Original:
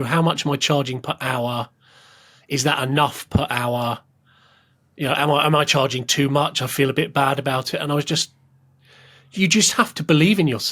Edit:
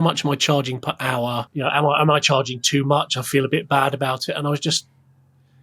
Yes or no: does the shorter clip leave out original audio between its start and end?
yes